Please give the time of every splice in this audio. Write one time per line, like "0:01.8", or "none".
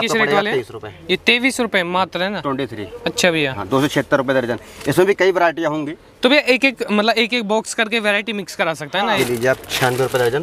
0:09.2